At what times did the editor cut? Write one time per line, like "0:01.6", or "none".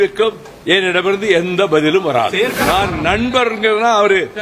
0:02.6